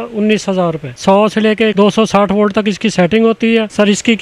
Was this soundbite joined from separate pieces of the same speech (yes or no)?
yes